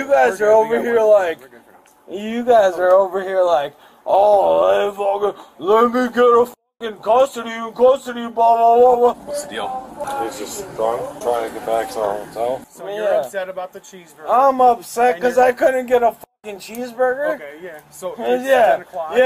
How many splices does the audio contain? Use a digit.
0